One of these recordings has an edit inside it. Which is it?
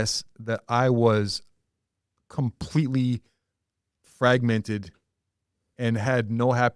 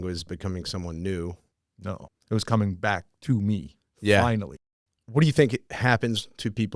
second; 3 cuts; at 1.9 s, 4.5 s, 5.7 s

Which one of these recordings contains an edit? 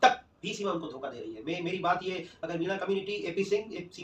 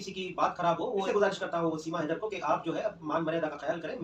second; 1 cut; at 1.1 s

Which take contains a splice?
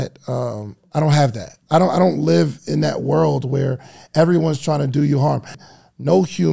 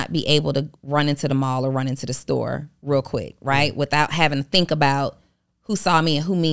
first; 2 cuts; at 1.6 s, 5.5 s

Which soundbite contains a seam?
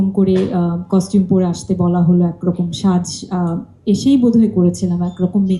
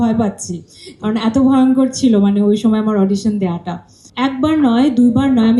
second; 1 cut; at 4.0 s

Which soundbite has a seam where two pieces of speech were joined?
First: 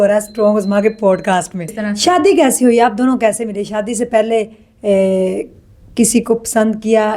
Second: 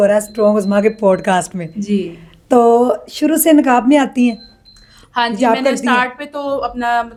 first; 1 cut; at 1.7 s

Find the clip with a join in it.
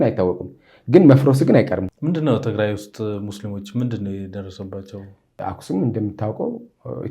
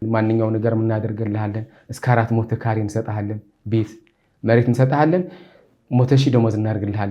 first; 2 cuts; at 1.9 s, 5.4 s

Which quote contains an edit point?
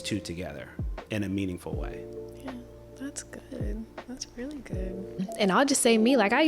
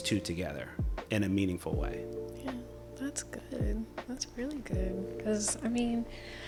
first; 1 cut; at 5.2 s

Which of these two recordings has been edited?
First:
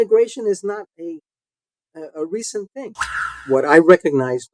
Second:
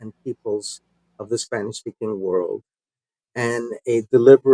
first; 1 cut; at 3.3 s

